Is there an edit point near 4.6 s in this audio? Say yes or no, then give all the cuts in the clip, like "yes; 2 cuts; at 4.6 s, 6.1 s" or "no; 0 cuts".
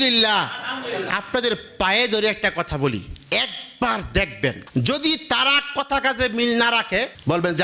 yes; 1 cut; at 4.6 s